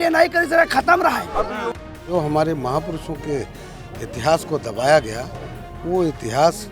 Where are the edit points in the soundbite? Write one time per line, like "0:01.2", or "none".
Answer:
0:01.7